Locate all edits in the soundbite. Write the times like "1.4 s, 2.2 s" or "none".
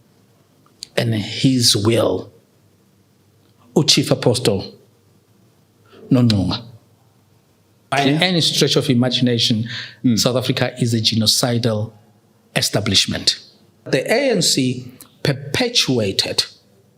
7.9 s, 13.9 s